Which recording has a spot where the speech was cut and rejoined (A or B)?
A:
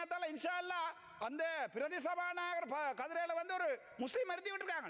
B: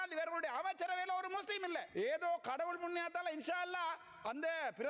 B